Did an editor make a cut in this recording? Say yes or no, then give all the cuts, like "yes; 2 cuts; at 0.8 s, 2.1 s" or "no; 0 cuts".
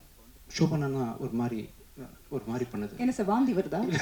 no; 0 cuts